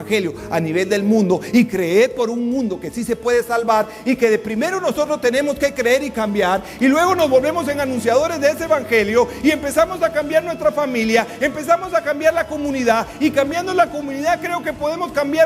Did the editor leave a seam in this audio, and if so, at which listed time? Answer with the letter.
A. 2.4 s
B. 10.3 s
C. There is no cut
C